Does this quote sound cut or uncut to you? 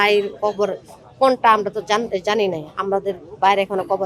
uncut